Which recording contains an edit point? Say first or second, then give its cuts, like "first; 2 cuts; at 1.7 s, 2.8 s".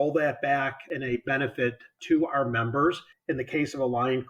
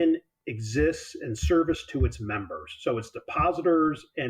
first; 3 cuts; at 0.9 s, 1.9 s, 3.1 s